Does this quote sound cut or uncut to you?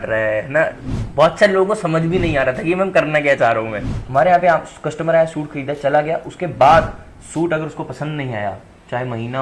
cut